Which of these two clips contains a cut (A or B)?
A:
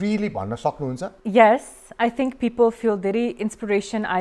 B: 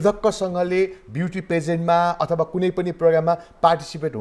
A